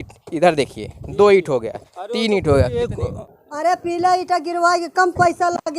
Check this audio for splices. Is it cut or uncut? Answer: cut